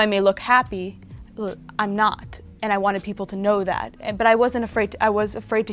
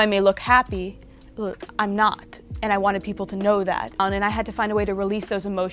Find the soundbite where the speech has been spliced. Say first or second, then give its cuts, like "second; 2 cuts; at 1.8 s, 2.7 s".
second; 1 cut; at 4.0 s